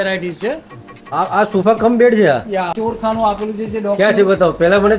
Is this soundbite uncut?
no; 1 cut; at 2.7 s

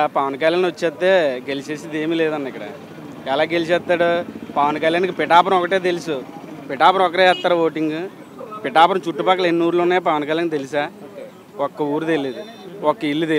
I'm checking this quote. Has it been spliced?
no; 0 cuts

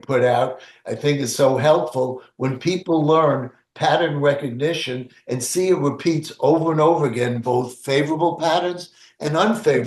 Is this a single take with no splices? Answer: yes; 0 cuts

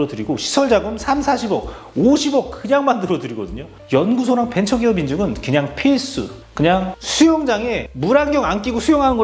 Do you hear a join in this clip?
yes; 1 cut; at 3.8 s

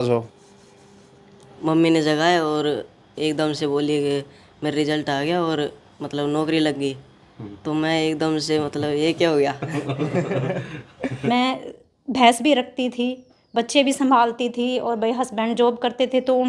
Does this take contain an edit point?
yes; 2 cuts; at 1.5 s, 11.2 s

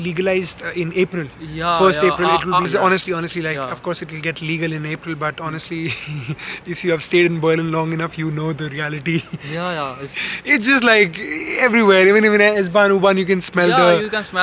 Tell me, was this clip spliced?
no; 0 cuts

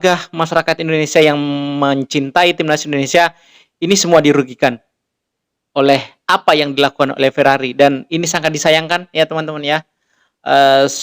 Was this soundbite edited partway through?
no; 0 cuts

